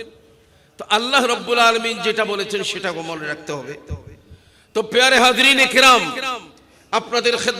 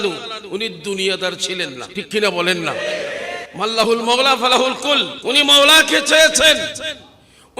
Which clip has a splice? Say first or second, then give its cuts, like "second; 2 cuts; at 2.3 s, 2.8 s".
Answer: second; 3 cuts; at 1.8 s, 3.4 s, 5.1 s